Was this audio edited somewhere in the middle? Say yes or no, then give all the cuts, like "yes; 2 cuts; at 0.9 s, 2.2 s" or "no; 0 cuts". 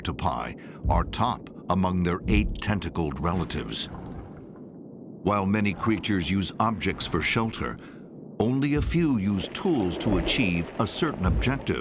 no; 0 cuts